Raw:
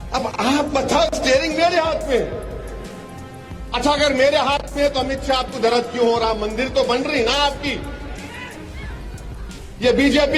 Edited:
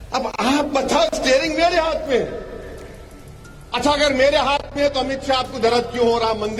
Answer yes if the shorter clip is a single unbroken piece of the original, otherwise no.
yes